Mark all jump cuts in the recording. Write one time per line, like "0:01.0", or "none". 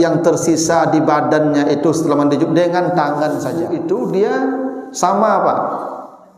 0:03.6